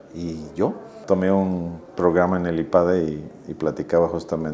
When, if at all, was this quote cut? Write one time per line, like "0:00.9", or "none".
0:01.0

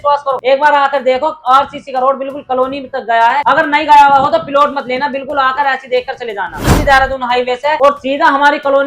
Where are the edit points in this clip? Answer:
0:06.7

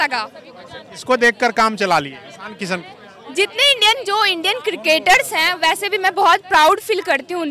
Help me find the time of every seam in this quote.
none

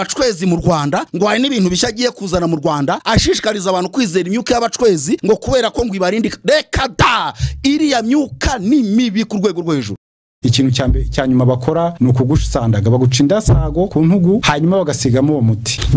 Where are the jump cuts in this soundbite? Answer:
0:01.1
0:03.0
0:05.2
0:10.4

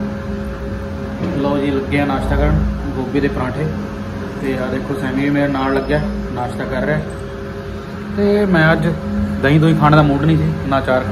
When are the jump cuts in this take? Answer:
none

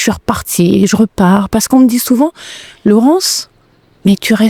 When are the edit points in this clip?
none

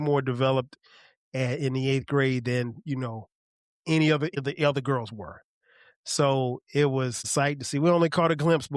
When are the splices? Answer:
0:04.3
0:07.2

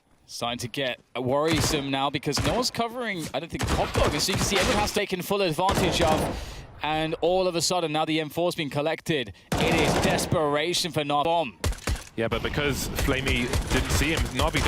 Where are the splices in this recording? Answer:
0:05.0
0:11.2

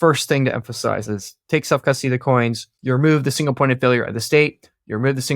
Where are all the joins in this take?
0:01.0
0:02.7

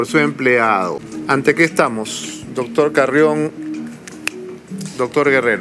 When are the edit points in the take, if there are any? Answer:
0:01.1

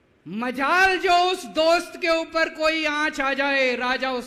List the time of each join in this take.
none

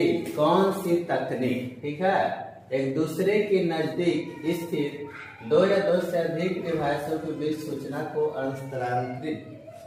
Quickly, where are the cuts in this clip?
none

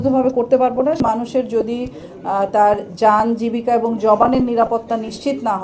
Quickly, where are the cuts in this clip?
0:01.0

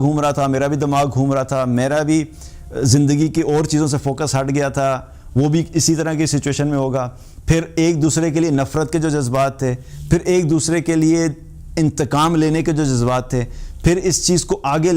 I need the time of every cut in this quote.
none

